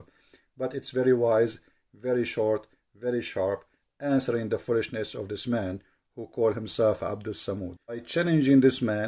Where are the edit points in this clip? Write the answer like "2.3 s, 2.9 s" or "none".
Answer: 8.1 s